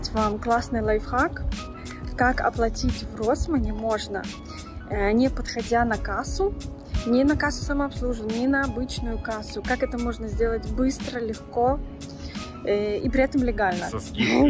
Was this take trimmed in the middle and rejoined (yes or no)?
no